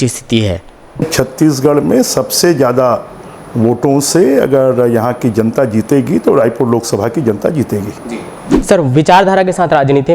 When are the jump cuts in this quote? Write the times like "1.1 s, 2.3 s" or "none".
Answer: 1.1 s, 8.4 s